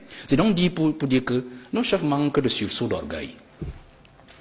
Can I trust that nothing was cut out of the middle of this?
yes; 0 cuts

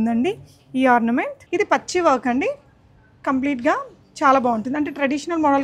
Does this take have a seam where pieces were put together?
yes; 1 cut; at 1.4 s

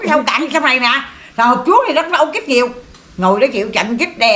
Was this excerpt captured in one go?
yes; 0 cuts

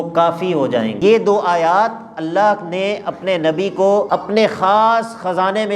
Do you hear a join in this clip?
yes; 2 cuts; at 1.0 s, 4.1 s

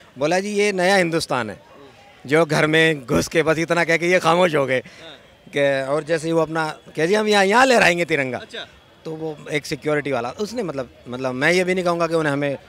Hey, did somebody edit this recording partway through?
no; 0 cuts

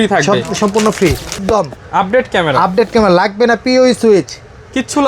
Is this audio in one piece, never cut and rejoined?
no; 1 cut; at 1.4 s

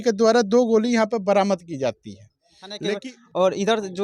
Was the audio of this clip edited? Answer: yes; 1 cut; at 2.8 s

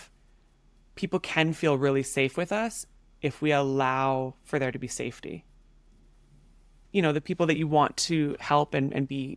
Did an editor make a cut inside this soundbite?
yes; 1 cut; at 6.7 s

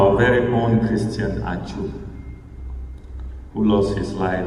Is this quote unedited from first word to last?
yes; 0 cuts

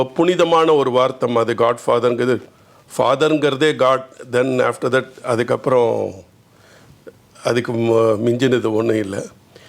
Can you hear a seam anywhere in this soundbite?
no; 0 cuts

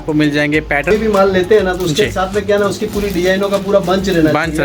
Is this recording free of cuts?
no; 1 cut; at 0.9 s

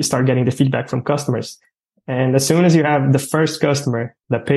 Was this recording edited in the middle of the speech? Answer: no; 0 cuts

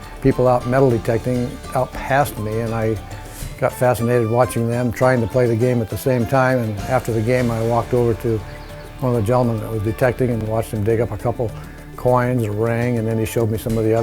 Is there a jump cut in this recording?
yes; 1 cut; at 10.4 s

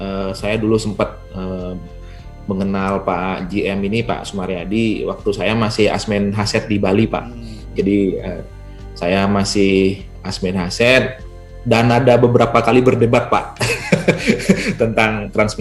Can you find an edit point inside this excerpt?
no; 0 cuts

